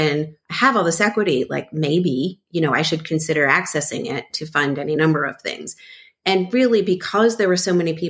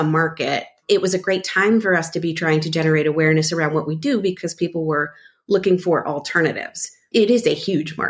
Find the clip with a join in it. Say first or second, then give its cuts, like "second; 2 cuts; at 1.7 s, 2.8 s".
second; 2 cuts; at 0.8 s, 7.0 s